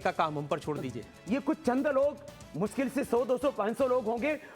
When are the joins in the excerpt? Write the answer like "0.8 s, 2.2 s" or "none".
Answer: 1.1 s